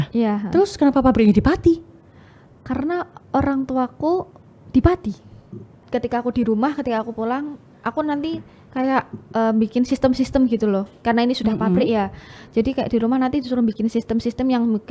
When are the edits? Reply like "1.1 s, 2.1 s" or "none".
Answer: 5.8 s

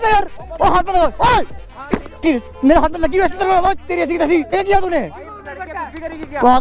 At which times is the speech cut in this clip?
4.5 s

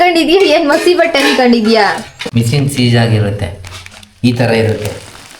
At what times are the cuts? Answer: 2.1 s

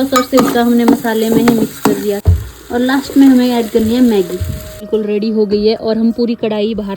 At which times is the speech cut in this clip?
2.2 s, 4.8 s

